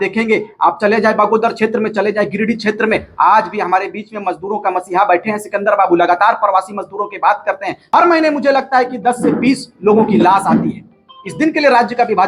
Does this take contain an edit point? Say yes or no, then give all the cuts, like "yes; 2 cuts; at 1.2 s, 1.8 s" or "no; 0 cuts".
yes; 1 cut; at 7.9 s